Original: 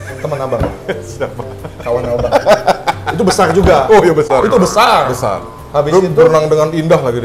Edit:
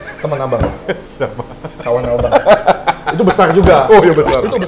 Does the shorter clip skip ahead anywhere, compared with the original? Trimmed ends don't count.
no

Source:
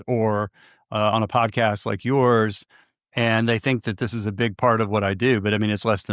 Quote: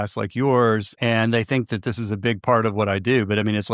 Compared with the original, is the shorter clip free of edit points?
no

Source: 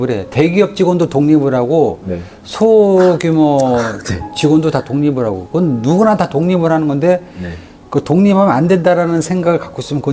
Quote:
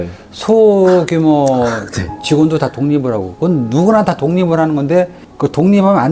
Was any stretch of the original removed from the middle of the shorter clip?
yes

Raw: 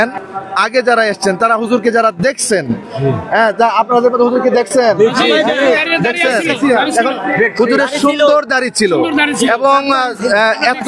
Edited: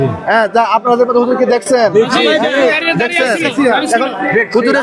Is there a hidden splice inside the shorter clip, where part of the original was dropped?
no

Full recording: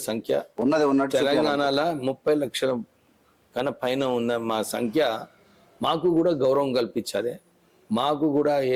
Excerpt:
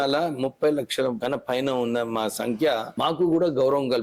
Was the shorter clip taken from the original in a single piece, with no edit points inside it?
no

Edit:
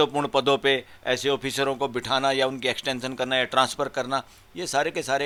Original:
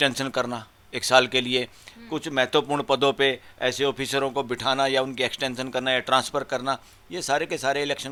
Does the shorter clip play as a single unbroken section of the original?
yes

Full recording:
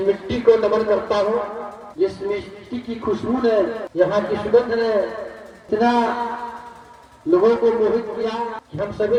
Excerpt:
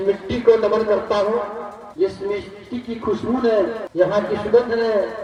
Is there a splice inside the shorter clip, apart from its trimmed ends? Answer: no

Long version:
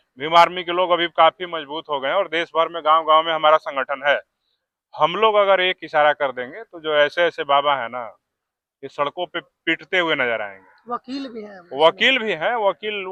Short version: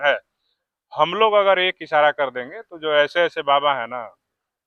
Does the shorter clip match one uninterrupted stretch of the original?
yes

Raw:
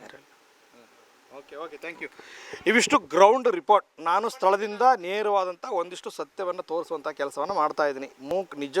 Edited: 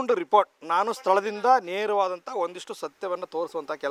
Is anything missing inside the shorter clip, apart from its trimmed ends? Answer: no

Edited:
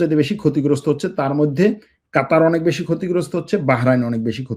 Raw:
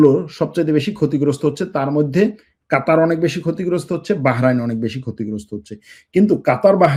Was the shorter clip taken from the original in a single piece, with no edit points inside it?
yes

